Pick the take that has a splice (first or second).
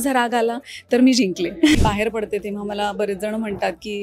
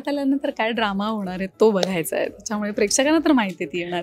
first